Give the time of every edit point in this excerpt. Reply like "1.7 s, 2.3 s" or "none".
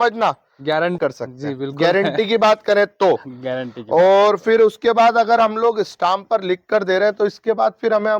0.9 s